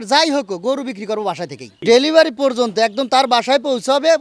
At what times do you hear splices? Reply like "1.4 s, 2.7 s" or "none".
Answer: 1.8 s